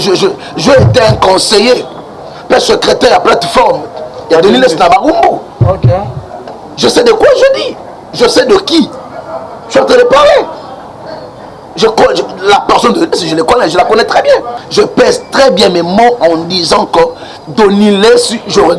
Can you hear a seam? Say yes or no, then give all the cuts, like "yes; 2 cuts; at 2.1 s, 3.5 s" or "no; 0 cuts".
yes; 1 cut; at 14.6 s